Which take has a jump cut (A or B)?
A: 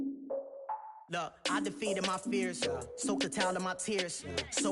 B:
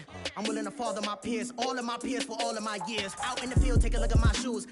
A